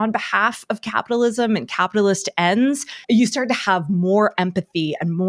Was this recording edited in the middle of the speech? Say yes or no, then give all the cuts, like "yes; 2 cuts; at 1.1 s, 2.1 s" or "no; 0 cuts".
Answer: yes; 1 cut; at 2.9 s